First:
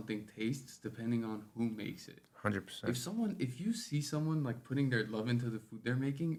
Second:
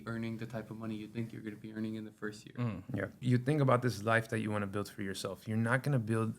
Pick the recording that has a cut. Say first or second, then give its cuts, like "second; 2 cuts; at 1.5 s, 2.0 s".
second; 1 cut; at 3.2 s